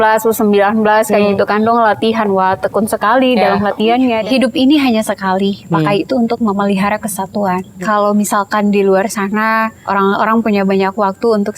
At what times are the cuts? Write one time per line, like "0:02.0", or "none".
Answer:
0:04.2
0:07.7
0:09.8